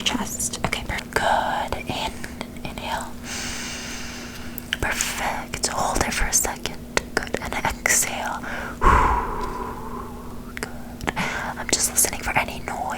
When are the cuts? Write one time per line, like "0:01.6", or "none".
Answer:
0:01.0